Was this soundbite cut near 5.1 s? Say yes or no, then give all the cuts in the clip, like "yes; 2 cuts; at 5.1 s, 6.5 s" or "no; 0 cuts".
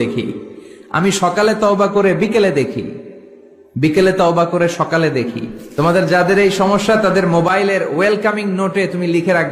yes; 1 cut; at 5.1 s